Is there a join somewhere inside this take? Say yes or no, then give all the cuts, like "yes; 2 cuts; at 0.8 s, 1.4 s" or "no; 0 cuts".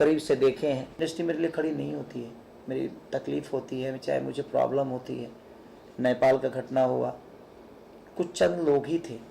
yes; 1 cut; at 1.0 s